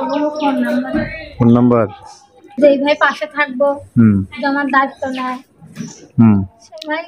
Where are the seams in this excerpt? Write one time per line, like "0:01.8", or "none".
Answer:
0:02.5